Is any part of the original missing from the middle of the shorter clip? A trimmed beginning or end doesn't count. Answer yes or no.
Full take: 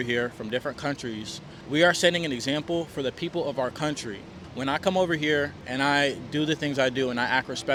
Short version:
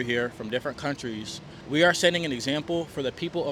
no